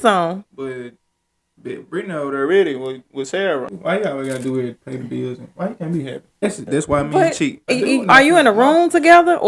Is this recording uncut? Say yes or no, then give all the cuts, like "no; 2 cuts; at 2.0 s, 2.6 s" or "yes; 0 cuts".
no; 3 cuts; at 3.7 s, 6.4 s, 7.7 s